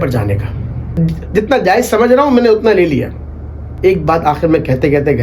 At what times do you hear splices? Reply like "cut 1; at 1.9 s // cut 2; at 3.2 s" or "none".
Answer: cut 1; at 0.9 s // cut 2; at 3.7 s